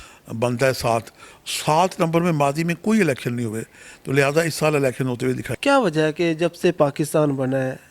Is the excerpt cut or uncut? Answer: cut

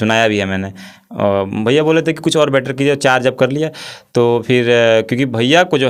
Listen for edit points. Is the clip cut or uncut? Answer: uncut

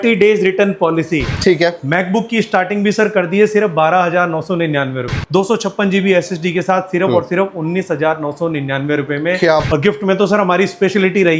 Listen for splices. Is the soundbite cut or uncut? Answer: cut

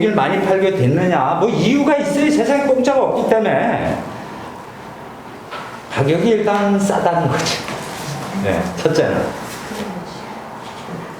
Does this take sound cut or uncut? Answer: cut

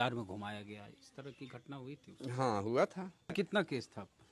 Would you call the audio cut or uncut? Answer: cut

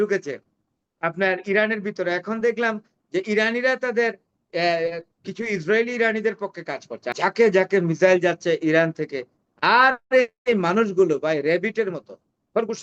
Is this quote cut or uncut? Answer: cut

